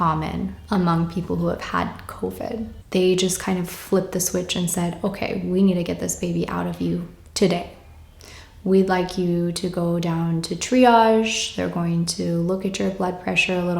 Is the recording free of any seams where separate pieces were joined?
no; 1 cut; at 2.7 s

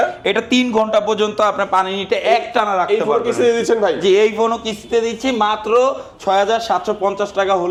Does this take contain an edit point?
no; 0 cuts

